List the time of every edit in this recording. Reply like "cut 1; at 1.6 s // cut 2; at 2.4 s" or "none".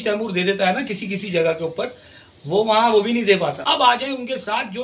cut 1; at 3.6 s

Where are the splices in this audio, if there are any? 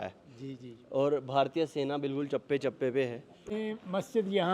cut 1; at 3.5 s

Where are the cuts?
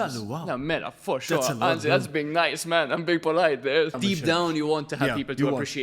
cut 1; at 4.0 s

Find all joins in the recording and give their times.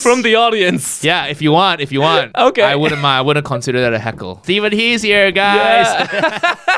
cut 1; at 2.3 s // cut 2; at 4.4 s

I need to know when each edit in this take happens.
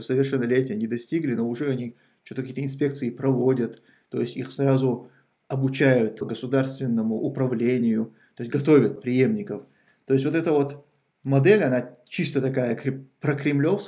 cut 1; at 6.2 s // cut 2; at 9.0 s

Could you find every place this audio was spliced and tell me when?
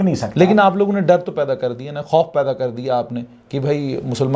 none

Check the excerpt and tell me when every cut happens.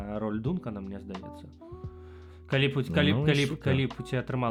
none

